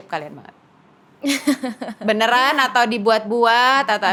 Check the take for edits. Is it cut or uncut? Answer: uncut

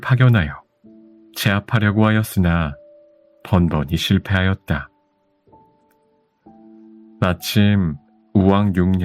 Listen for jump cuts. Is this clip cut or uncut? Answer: cut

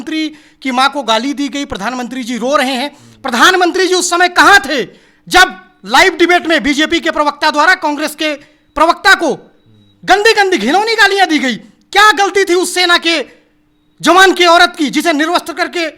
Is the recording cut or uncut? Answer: uncut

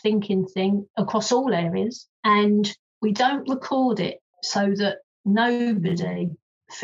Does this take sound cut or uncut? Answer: cut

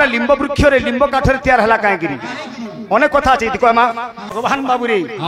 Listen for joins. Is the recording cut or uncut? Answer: cut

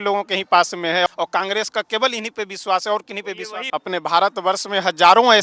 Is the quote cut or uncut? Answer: cut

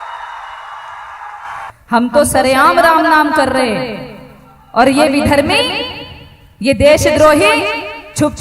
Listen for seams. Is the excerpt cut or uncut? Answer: cut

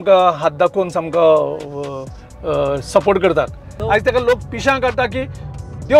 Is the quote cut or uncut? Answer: cut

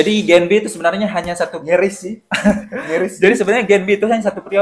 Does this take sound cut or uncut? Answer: uncut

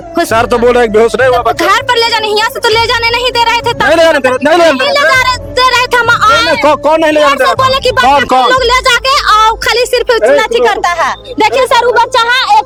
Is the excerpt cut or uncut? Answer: uncut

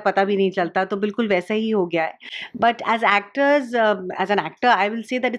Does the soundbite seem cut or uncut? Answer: uncut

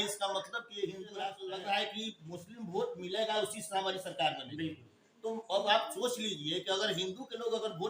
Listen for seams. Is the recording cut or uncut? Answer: cut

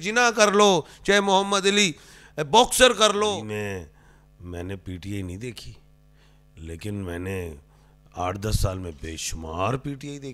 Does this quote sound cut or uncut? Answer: cut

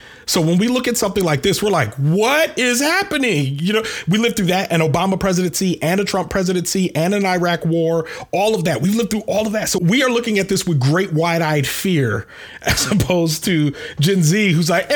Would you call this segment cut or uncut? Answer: cut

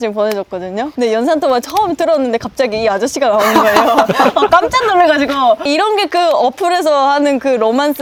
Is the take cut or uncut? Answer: uncut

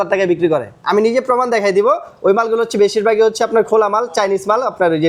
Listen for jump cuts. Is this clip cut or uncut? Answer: uncut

